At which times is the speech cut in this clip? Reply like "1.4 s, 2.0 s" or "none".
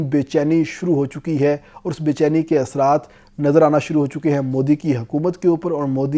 none